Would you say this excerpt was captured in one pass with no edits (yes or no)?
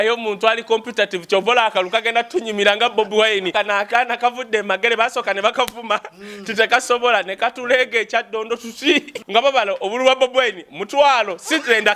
no